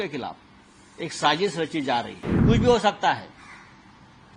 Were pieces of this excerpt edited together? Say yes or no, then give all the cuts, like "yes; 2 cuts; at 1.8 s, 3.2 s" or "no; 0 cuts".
yes; 1 cut; at 2.2 s